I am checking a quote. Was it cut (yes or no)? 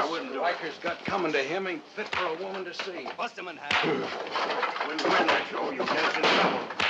yes